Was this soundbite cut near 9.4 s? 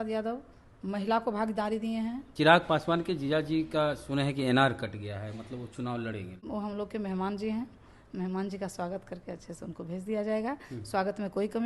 no; 2 cuts; at 2.2 s, 6.5 s

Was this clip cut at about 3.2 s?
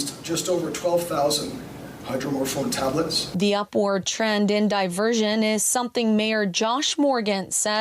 yes; 1 cut; at 3.2 s

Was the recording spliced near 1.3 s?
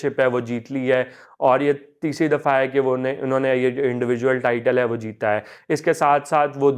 no; 0 cuts

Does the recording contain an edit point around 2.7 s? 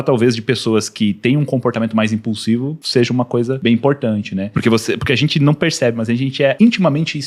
no; 0 cuts

